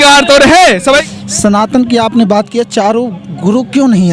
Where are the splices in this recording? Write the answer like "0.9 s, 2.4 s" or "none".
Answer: 1.0 s